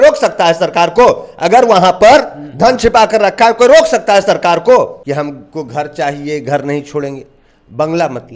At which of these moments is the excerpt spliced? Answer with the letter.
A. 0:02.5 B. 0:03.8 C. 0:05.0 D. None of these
C